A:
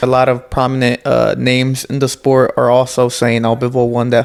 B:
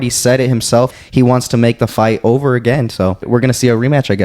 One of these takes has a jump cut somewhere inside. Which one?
B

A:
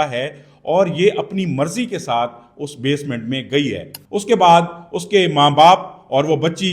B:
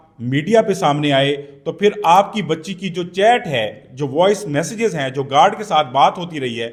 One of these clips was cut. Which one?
A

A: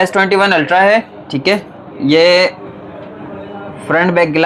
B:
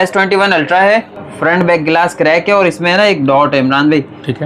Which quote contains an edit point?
B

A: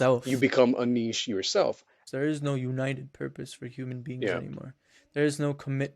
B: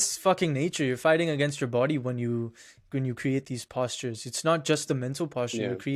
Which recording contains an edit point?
A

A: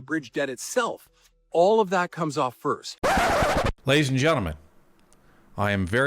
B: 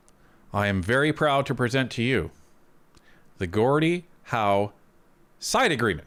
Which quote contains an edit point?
A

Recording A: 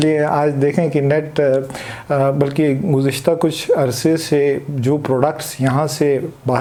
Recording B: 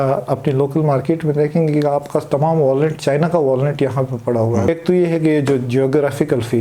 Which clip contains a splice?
B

